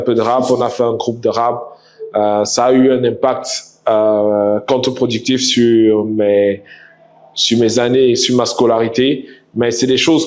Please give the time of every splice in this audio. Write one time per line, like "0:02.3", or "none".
none